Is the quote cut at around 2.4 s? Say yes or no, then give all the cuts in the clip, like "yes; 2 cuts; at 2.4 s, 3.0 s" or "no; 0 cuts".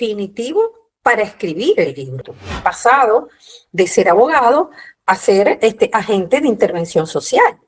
yes; 1 cut; at 2.4 s